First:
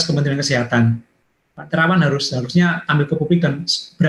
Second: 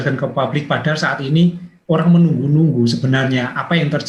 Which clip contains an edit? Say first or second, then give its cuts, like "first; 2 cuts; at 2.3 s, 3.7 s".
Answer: second; 1 cut; at 1.7 s